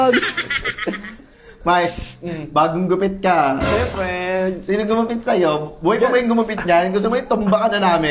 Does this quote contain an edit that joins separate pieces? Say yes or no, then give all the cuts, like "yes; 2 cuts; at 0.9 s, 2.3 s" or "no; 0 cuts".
no; 0 cuts